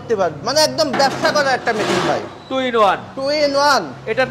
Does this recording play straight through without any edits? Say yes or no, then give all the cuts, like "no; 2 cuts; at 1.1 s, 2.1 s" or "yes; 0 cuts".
yes; 0 cuts